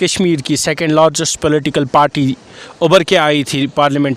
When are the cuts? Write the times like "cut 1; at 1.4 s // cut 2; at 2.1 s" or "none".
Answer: none